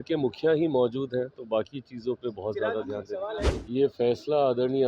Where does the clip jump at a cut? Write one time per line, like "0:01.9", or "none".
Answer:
0:03.5